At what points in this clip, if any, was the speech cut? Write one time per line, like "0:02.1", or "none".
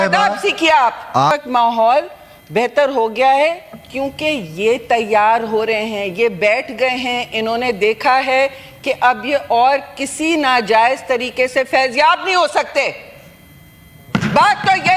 0:01.3